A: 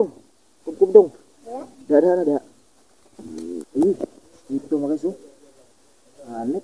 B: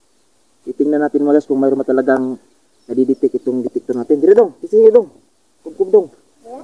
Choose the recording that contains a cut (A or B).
A